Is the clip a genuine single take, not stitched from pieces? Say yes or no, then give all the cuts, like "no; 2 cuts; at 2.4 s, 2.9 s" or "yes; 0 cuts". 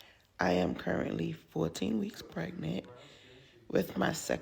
no; 1 cut; at 3.3 s